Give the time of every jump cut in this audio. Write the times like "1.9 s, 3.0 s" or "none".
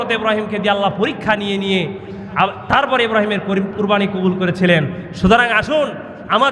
none